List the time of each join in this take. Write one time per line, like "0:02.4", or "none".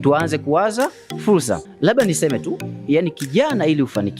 0:01.7